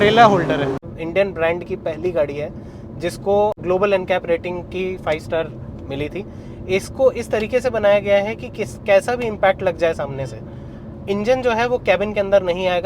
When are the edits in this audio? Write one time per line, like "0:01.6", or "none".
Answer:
0:01.0
0:03.6